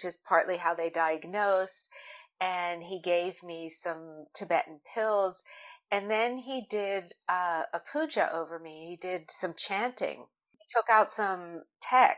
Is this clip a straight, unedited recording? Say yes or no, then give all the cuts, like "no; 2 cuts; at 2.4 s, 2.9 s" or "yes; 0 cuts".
yes; 0 cuts